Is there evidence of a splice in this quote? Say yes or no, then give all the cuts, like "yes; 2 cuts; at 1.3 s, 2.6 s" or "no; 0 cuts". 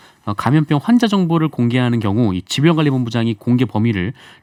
no; 0 cuts